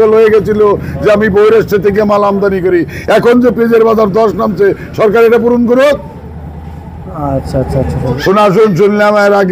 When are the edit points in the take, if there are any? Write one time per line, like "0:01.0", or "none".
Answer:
0:08.2